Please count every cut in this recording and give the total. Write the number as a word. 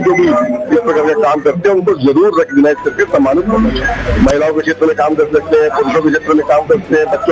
one